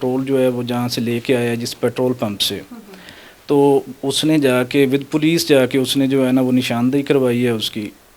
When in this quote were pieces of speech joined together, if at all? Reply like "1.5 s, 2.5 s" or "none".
none